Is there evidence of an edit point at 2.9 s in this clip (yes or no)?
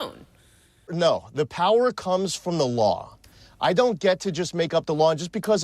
no